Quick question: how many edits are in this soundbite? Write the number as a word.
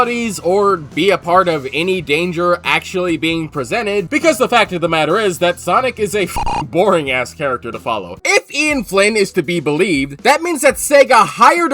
two